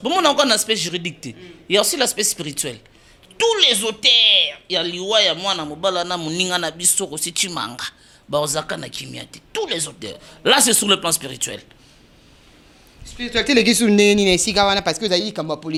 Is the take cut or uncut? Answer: uncut